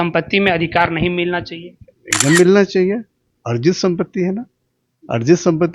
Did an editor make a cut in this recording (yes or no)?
no